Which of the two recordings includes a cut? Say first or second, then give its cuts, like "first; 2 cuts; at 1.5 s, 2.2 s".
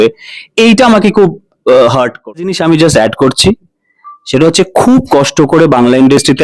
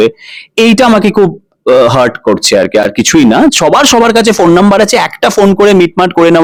first; 1 cut; at 2.5 s